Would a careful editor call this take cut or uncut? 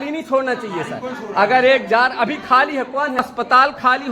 cut